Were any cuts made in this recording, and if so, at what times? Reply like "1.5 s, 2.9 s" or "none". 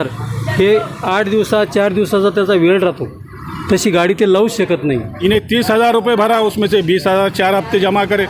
5.1 s